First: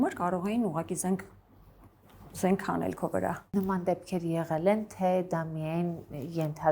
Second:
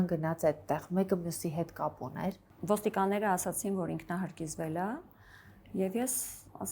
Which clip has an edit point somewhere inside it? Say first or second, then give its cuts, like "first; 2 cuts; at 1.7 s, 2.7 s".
second; 1 cut; at 2.4 s